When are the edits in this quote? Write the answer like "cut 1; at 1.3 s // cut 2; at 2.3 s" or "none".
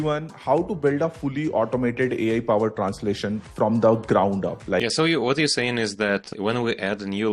cut 1; at 4.8 s // cut 2; at 6.2 s